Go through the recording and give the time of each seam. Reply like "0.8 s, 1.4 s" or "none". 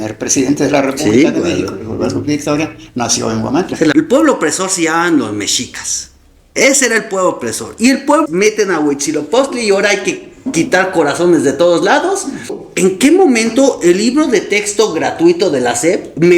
3.9 s, 8.2 s, 12.6 s